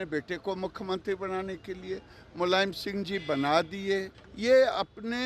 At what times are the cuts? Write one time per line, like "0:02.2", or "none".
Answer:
0:04.2